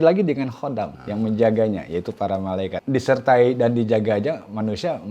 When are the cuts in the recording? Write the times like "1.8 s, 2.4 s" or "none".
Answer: 1.0 s, 2.8 s